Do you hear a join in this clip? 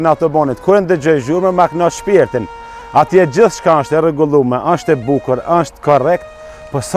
no; 0 cuts

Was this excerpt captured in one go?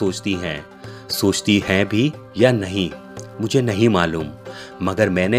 yes; 0 cuts

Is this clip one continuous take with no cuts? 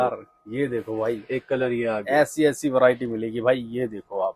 yes; 0 cuts

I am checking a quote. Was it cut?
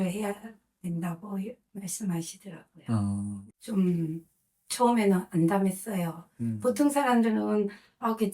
yes; 1 cut; at 3.4 s

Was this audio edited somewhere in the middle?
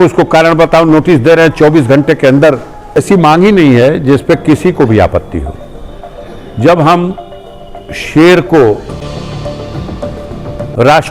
yes; 1 cut; at 3.0 s

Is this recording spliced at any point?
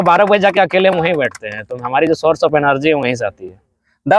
no; 0 cuts

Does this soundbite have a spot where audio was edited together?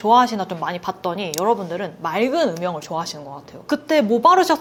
no; 0 cuts

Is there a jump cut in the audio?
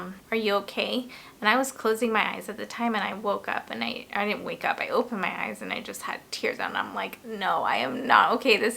no; 0 cuts

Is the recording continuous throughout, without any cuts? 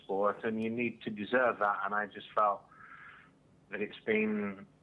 no; 1 cut; at 1.2 s

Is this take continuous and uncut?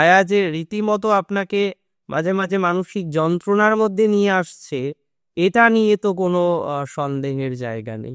yes; 0 cuts

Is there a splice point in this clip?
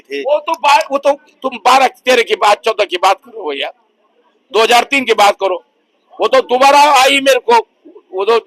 no; 0 cuts

